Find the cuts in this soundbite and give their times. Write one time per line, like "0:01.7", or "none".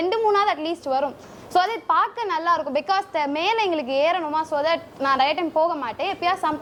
none